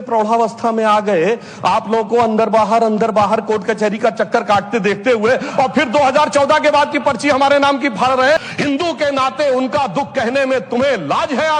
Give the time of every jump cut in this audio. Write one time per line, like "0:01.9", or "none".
0:08.4